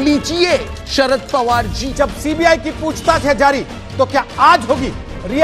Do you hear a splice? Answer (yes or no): yes